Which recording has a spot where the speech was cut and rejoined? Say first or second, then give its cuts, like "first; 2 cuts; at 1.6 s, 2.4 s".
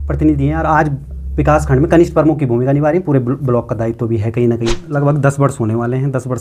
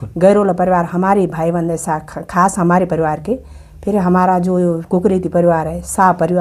first; 1 cut; at 4.8 s